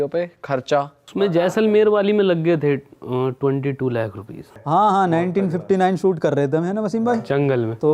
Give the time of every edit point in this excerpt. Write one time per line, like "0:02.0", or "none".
0:01.0
0:04.5